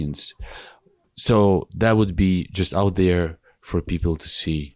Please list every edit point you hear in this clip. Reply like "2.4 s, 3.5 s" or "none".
1.1 s